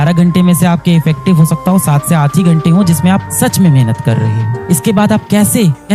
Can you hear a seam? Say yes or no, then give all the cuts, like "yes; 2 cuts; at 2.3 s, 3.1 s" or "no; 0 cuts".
no; 0 cuts